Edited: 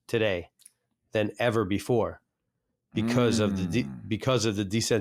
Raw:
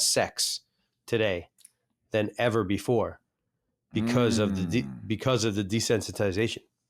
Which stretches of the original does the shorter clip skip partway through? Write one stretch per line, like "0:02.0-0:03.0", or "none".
none